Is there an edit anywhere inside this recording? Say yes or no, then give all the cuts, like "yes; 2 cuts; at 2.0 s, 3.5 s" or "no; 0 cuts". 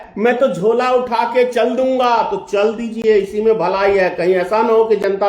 no; 0 cuts